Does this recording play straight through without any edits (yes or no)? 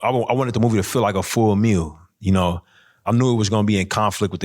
no